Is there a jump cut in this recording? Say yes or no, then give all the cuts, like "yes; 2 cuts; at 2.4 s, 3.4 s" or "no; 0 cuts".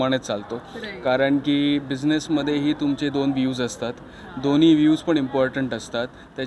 no; 0 cuts